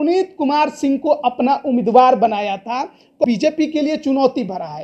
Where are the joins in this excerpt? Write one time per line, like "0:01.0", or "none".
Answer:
0:03.2